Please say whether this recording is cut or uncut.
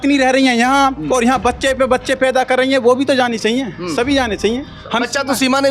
uncut